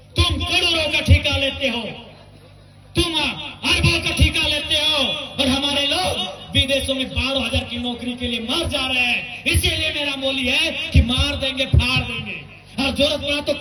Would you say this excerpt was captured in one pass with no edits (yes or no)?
yes